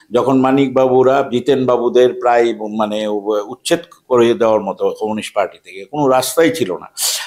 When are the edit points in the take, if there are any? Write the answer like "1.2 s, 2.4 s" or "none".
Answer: none